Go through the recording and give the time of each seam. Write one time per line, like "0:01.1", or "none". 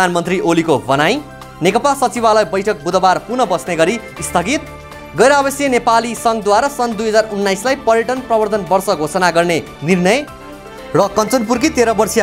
none